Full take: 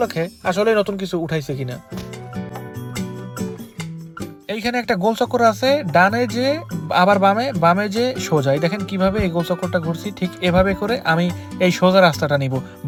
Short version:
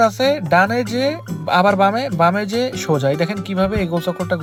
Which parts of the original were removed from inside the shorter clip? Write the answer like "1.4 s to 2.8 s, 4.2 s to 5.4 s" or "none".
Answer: none